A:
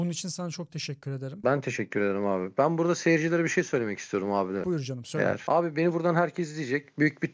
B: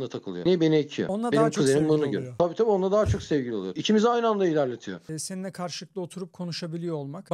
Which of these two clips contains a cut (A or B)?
B